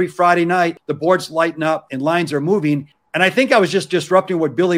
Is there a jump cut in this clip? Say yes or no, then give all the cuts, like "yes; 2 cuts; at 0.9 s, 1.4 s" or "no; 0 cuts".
yes; 3 cuts; at 0.8 s, 1.9 s, 3.0 s